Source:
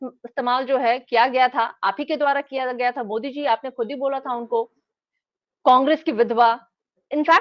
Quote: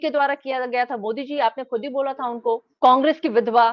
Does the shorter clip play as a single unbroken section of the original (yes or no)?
no